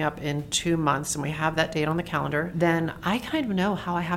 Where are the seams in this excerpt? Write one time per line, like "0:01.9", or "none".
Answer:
0:02.5